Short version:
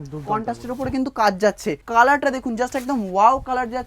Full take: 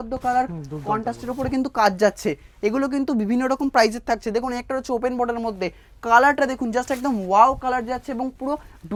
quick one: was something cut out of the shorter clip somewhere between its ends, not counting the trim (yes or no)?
yes